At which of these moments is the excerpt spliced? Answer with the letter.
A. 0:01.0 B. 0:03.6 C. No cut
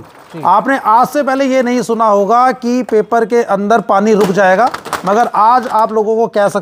C